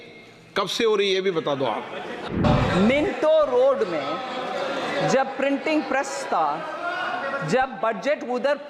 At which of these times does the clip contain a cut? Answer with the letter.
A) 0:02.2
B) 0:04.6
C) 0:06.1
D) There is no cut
A